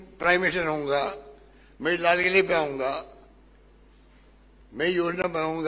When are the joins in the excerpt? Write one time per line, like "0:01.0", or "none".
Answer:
none